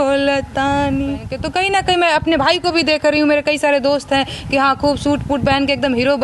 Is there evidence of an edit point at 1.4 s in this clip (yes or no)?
yes